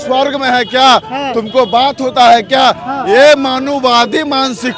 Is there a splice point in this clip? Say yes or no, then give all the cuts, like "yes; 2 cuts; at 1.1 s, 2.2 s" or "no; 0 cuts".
no; 0 cuts